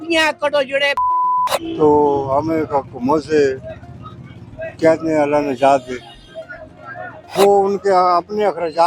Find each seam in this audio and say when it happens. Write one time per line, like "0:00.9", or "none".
0:01.5
0:07.2